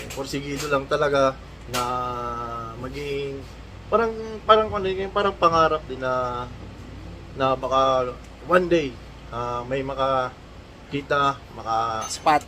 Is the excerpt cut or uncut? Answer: cut